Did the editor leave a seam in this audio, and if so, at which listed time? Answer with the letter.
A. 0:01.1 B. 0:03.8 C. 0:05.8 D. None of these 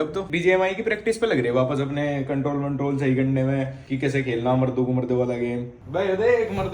C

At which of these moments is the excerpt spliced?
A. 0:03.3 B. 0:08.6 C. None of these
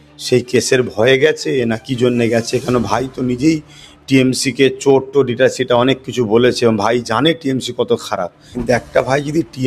B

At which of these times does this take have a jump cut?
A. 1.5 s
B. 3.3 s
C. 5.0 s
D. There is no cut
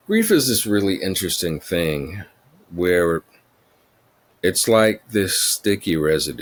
D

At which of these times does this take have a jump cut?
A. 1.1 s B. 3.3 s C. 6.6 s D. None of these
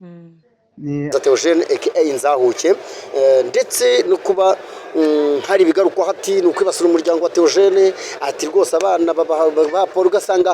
A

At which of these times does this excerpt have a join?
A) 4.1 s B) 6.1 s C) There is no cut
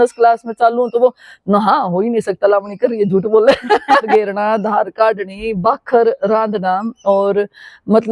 A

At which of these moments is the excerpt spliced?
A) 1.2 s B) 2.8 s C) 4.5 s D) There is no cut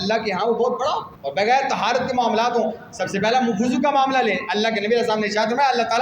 A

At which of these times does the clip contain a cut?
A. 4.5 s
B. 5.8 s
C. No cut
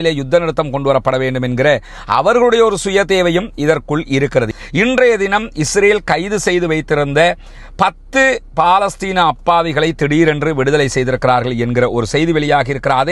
A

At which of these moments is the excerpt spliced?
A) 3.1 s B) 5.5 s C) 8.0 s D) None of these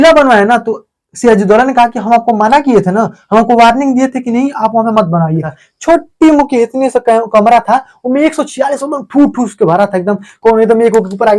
B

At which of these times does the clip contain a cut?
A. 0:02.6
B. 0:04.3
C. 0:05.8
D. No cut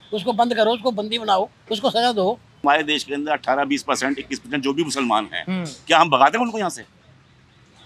A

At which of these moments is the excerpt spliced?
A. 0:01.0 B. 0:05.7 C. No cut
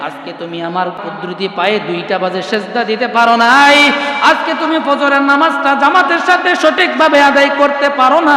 A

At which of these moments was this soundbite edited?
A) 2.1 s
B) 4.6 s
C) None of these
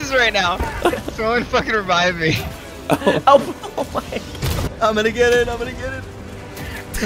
B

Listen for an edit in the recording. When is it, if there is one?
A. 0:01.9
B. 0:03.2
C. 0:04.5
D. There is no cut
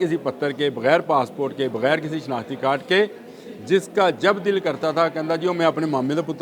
D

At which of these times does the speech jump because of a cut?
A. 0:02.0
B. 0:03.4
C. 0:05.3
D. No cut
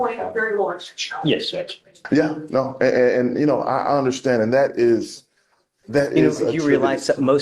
A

